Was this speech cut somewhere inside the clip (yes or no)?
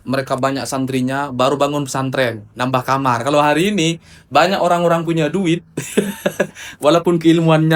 no